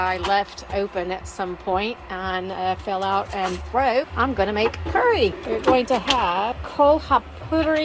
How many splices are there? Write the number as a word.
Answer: three